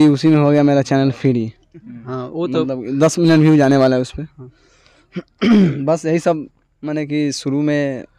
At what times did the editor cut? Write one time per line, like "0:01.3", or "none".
none